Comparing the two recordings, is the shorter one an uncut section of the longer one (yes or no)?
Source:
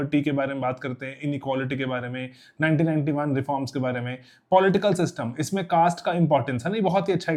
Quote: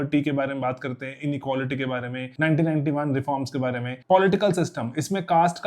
no